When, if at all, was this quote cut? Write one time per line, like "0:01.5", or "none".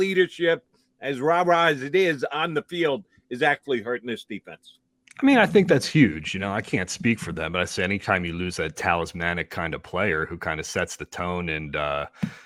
none